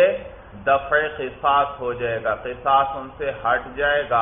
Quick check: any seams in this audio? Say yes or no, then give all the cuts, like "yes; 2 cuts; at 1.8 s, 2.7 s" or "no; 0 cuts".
no; 0 cuts